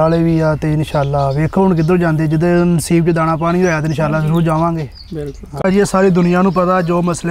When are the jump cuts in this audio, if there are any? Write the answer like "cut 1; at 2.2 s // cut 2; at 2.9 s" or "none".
cut 1; at 5.6 s